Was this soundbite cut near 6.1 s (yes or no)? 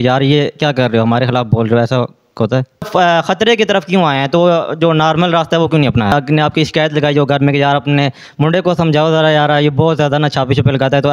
yes